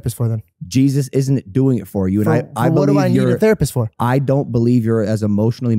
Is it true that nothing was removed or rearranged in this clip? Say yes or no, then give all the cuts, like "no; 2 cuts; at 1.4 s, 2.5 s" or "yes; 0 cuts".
yes; 0 cuts